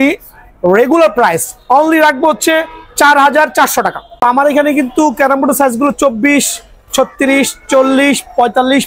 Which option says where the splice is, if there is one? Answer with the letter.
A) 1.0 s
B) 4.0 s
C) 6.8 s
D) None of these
B